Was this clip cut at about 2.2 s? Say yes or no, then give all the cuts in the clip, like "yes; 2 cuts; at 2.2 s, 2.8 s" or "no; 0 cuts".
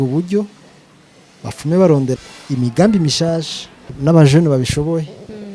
yes; 2 cuts; at 2.2 s, 3.8 s